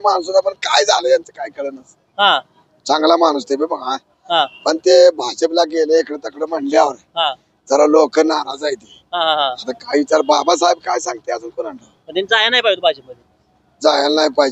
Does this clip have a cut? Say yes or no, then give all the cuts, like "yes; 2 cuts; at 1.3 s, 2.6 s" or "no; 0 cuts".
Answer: no; 0 cuts